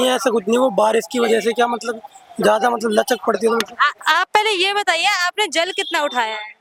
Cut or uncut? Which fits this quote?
uncut